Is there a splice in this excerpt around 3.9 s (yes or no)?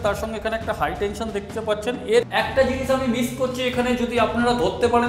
no